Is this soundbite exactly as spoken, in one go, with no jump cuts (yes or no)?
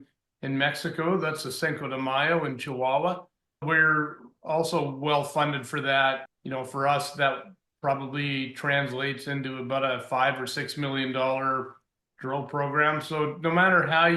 no